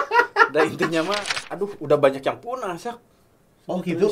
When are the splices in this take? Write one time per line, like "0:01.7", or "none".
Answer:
0:01.4